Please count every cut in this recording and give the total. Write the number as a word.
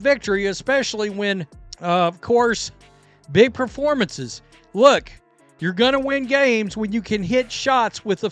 one